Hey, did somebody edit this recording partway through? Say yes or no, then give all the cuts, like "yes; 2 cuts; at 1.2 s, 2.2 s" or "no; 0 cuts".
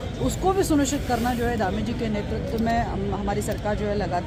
no; 0 cuts